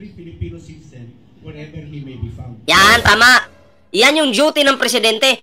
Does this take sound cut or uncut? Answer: uncut